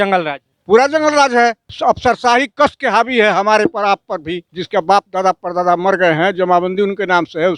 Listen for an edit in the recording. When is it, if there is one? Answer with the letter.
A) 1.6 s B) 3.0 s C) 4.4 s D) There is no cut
C